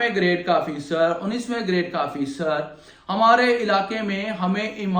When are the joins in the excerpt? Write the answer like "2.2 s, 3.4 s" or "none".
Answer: none